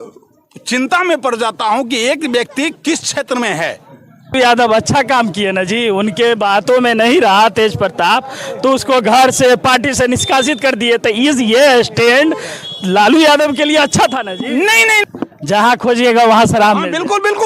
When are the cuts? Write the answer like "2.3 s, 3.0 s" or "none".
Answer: 4.3 s, 15.0 s